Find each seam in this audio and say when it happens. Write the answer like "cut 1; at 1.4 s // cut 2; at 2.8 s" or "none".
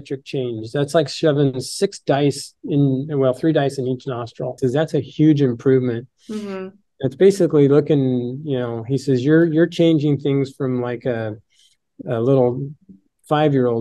cut 1; at 4.6 s